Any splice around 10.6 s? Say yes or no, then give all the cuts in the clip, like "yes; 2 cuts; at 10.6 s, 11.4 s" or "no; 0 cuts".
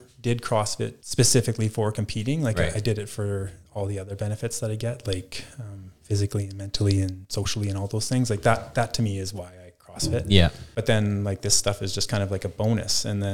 yes; 2 cuts; at 1.0 s, 10.6 s